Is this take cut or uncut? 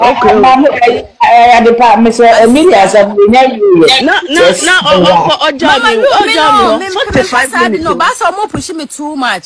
uncut